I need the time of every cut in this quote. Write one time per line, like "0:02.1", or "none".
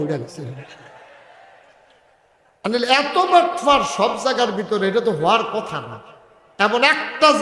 none